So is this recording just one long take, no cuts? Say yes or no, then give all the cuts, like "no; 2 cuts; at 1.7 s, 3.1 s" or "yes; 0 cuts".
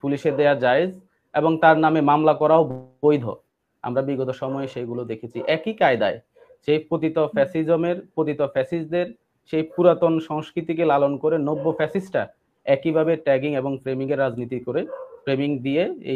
yes; 0 cuts